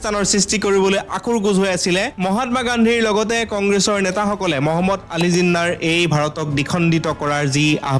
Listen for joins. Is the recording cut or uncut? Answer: uncut